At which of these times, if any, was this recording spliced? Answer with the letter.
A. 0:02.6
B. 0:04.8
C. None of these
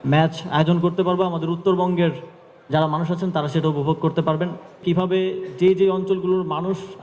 B